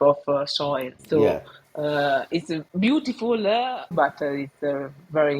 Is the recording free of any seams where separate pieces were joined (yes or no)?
no